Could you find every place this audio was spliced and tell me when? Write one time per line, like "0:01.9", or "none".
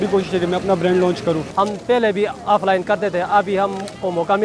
0:01.4